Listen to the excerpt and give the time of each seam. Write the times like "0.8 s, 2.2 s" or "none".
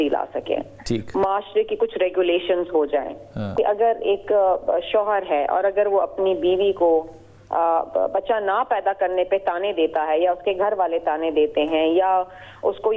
3.5 s